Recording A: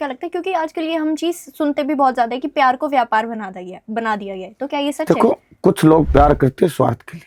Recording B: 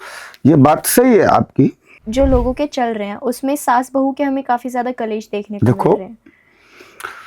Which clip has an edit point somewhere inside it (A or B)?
B